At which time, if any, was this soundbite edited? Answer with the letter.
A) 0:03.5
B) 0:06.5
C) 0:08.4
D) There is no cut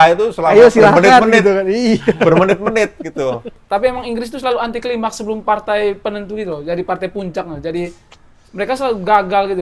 A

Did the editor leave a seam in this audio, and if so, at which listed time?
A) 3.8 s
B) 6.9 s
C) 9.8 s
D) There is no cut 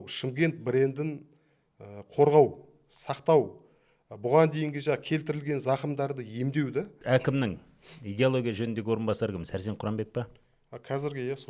B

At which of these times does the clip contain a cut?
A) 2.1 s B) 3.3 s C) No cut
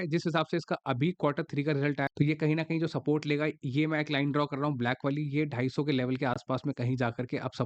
A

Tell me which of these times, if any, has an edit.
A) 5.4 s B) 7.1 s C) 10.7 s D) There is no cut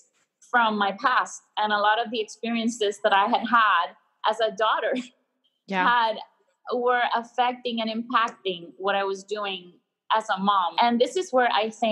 C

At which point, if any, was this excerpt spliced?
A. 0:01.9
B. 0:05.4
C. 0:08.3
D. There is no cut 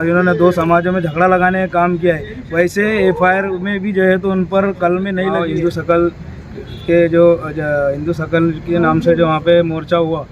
B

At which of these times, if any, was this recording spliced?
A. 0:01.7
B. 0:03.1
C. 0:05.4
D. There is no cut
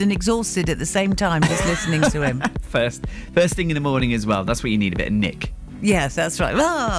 B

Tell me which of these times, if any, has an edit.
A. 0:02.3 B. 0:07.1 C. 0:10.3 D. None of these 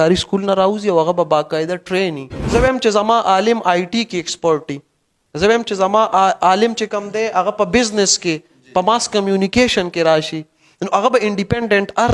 A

